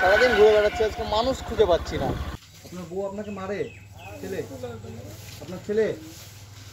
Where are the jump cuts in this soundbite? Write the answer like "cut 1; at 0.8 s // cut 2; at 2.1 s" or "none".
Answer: cut 1; at 2.3 s

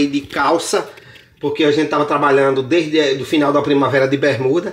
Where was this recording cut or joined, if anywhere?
none

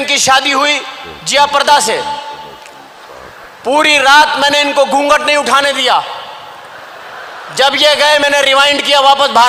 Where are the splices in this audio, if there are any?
none

